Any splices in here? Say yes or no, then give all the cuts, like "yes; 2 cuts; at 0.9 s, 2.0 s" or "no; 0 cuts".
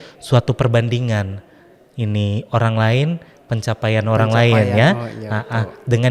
no; 0 cuts